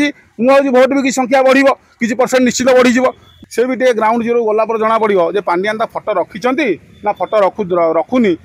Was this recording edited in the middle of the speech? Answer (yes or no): yes